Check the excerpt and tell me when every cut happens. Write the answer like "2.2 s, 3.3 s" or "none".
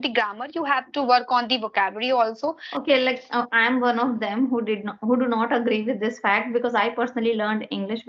2.6 s